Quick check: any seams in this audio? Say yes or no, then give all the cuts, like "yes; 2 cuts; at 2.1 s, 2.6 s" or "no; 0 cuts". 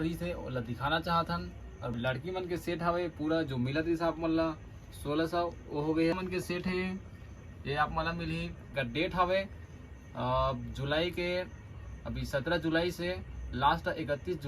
yes; 3 cuts; at 1.9 s, 6.1 s, 8.7 s